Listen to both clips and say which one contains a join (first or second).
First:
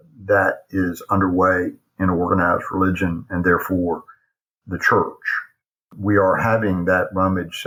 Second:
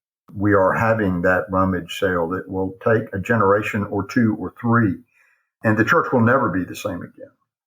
second